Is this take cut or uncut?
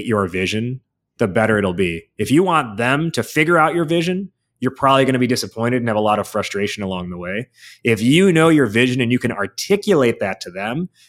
uncut